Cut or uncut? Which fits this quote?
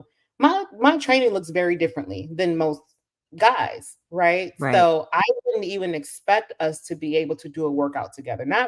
uncut